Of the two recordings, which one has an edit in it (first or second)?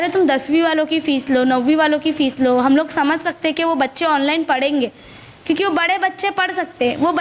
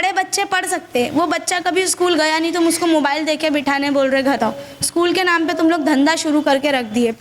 second